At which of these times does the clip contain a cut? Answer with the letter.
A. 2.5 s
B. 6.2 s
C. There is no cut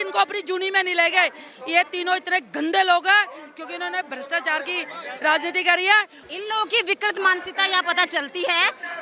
C